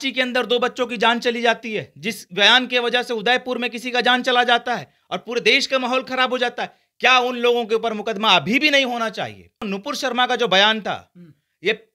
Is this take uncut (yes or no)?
no